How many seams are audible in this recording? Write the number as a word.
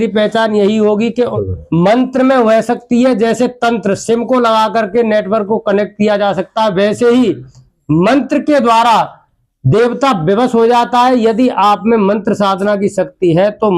one